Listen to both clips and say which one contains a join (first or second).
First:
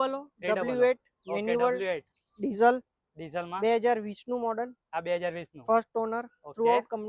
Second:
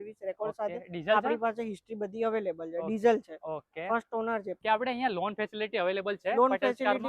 second